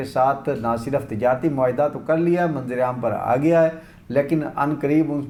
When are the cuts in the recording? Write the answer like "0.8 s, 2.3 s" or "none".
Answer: none